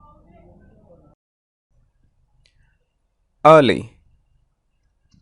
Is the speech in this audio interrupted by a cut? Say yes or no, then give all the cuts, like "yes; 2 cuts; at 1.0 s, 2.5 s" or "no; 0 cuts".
yes; 1 cut; at 1.1 s